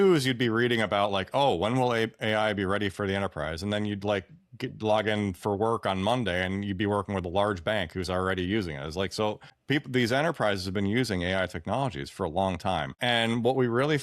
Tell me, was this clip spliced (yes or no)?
yes